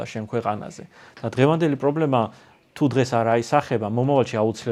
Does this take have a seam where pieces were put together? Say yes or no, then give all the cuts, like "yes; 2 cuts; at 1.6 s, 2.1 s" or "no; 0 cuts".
no; 0 cuts